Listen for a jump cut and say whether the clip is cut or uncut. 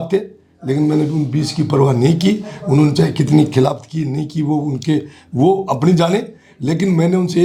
uncut